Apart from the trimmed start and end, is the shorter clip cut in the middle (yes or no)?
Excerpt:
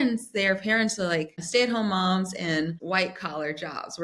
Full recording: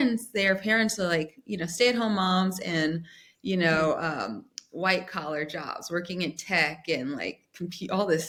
yes